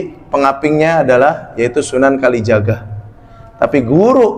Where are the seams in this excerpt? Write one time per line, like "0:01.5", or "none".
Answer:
none